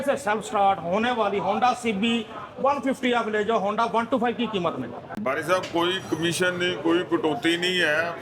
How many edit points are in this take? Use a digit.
1